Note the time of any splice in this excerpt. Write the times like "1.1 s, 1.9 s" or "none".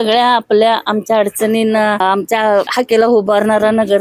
2.4 s